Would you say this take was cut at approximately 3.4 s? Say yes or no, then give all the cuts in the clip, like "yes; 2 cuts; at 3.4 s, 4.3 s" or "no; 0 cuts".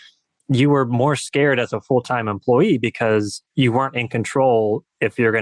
yes; 1 cut; at 3.4 s